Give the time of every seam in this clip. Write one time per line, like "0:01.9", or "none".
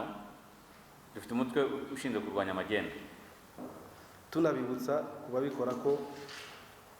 0:03.6